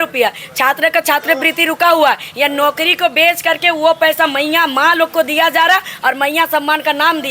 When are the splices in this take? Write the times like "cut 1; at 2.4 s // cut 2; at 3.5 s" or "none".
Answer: none